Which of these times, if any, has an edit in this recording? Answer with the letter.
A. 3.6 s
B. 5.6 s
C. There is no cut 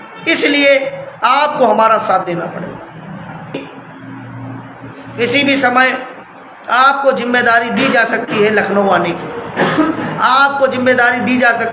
A